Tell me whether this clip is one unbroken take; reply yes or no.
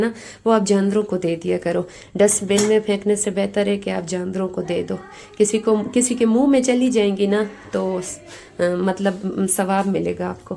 yes